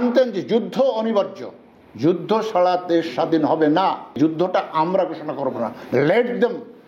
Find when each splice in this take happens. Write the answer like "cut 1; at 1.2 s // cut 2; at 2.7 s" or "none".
cut 1; at 4.2 s